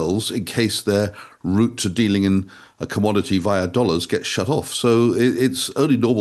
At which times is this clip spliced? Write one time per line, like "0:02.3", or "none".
none